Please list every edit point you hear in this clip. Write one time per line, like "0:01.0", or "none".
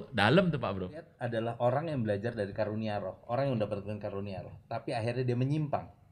0:01.2